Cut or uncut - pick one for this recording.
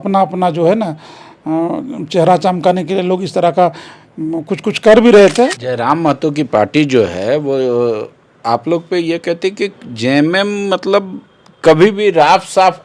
cut